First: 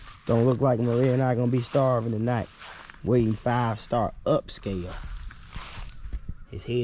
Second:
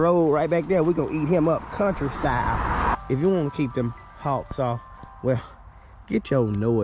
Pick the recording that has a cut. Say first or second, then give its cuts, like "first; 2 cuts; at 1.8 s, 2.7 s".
second; 1 cut; at 2.9 s